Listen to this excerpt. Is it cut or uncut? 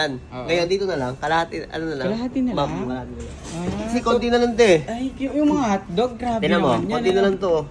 uncut